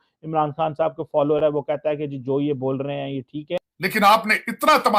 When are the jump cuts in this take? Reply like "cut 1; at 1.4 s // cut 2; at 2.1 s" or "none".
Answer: cut 1; at 3.6 s